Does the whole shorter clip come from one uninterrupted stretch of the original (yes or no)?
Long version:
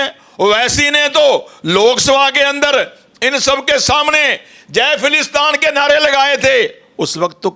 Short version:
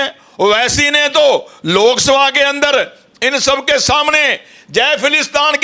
yes